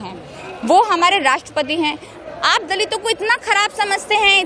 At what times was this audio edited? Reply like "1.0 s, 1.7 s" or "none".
2.1 s